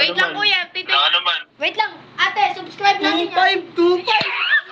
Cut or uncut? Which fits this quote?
uncut